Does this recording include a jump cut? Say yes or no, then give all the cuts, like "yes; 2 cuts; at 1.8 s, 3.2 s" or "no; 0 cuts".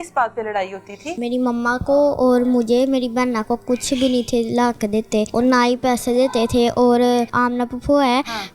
yes; 3 cuts; at 1.2 s, 5.3 s, 7.3 s